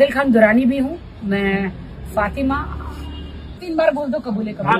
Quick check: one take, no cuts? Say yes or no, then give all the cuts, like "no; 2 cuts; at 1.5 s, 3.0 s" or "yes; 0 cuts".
no; 1 cut; at 3.6 s